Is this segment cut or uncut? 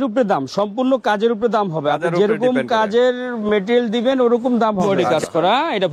cut